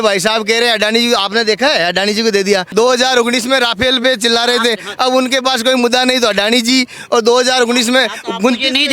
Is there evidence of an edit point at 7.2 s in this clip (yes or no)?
no